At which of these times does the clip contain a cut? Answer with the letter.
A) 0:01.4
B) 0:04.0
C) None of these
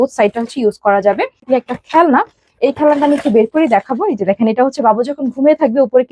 A